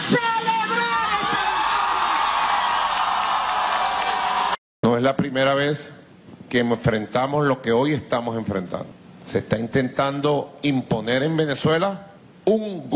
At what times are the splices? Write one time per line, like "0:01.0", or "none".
0:04.7